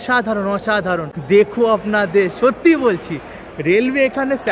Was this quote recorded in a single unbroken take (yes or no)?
no